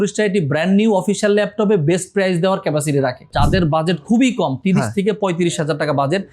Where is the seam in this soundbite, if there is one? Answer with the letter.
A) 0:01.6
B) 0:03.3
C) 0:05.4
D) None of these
B